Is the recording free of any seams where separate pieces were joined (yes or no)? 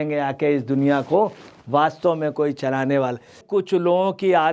no